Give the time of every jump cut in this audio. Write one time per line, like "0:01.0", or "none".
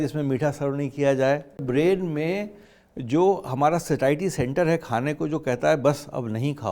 0:01.6

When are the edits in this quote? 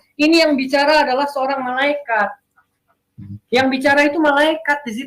none

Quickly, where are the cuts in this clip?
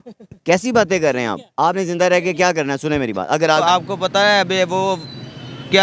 0:03.6

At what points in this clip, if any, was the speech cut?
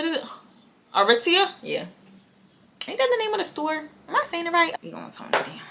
0:04.7

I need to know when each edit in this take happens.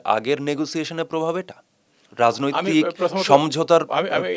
none

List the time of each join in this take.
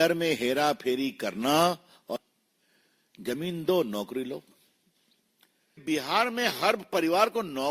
0:02.2
0:05.8

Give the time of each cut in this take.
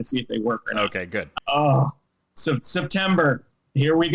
0:01.3

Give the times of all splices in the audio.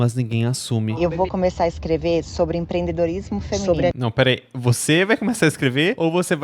0:01.0

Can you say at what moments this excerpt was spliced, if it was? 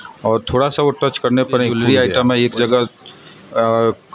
0:01.8

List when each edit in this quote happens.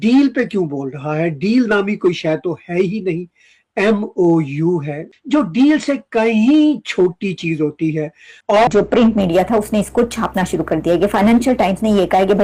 none

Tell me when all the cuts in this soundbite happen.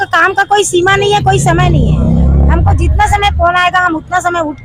none

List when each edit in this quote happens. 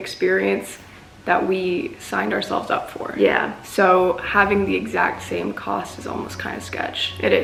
none

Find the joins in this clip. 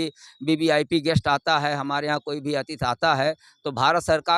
none

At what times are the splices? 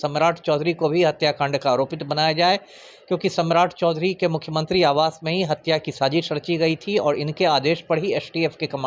none

